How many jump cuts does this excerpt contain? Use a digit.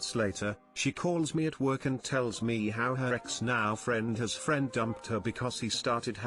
0